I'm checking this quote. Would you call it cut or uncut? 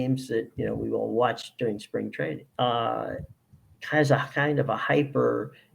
cut